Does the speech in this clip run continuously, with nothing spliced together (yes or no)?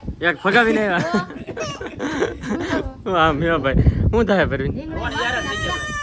yes